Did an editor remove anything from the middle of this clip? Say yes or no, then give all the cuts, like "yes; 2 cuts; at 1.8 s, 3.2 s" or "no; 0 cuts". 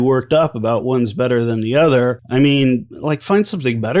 yes; 2 cuts; at 2.2 s, 2.9 s